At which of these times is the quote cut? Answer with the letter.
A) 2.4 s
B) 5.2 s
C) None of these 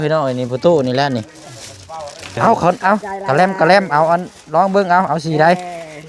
A